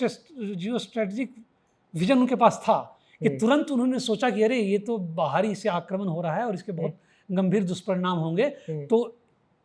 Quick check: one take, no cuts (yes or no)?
yes